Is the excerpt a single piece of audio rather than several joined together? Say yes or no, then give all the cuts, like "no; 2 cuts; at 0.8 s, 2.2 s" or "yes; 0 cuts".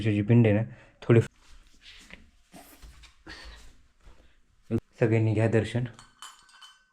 no; 2 cuts; at 1.2 s, 4.8 s